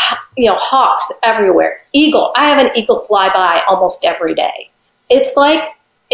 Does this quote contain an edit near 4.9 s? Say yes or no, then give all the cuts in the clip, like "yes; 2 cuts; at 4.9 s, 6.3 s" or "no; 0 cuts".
yes; 1 cut; at 4.9 s